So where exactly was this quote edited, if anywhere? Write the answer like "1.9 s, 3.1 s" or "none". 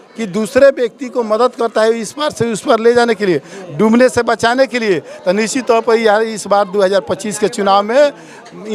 none

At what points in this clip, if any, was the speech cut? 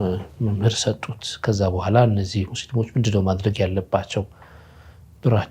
none

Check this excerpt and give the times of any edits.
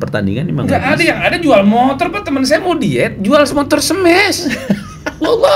none

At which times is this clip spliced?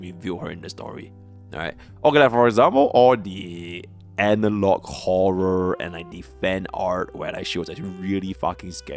none

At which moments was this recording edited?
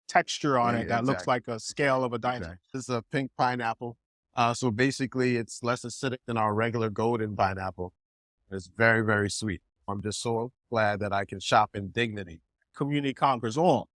2.7 s, 9.8 s, 12.7 s

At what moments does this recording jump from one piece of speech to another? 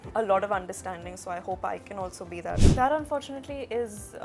2.6 s

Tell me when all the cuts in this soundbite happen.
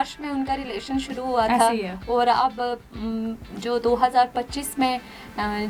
none

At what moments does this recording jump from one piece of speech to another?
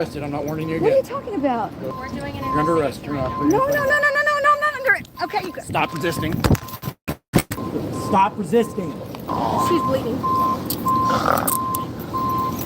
1.9 s, 7.6 s, 9.3 s

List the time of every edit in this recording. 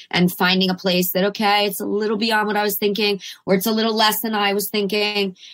none

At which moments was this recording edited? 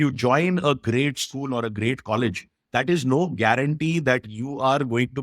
none

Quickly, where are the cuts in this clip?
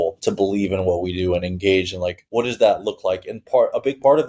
none

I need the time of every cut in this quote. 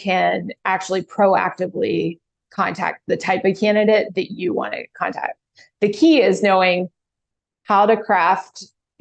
none

